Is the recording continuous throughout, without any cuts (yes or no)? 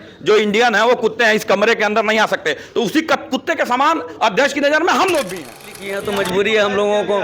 no